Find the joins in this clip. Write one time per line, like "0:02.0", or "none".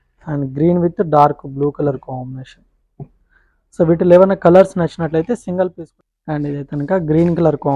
0:05.8